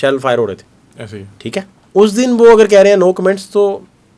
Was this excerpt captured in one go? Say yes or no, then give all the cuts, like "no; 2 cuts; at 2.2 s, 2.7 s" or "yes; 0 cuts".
no; 1 cut; at 1.8 s